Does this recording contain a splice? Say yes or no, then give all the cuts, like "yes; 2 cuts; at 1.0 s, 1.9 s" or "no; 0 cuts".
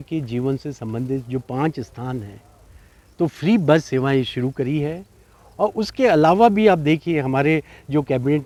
no; 0 cuts